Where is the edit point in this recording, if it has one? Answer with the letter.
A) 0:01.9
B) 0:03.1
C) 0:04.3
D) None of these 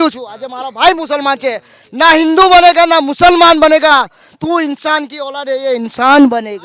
D